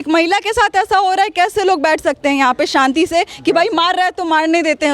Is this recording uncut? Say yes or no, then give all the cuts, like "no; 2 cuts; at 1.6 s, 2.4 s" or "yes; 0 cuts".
yes; 0 cuts